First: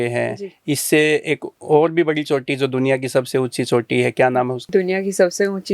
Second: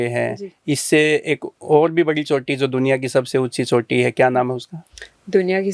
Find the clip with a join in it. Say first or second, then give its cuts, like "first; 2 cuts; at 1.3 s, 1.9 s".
first; 1 cut; at 4.6 s